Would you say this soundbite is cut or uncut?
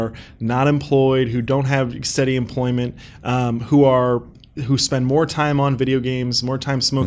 uncut